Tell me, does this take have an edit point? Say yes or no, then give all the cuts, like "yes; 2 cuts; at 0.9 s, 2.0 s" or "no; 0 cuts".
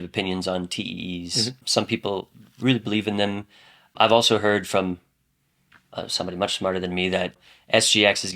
yes; 3 cuts; at 1.6 s, 3.9 s, 7.4 s